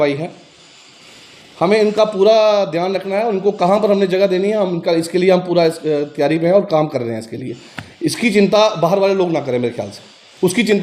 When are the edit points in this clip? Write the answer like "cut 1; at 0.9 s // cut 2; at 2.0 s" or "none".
none